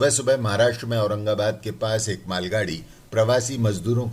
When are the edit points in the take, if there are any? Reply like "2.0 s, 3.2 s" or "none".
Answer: none